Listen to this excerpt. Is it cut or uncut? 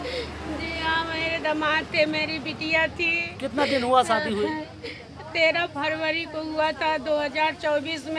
uncut